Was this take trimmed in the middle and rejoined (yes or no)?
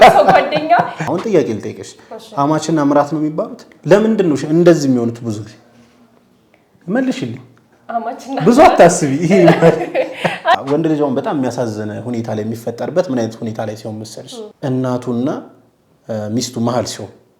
yes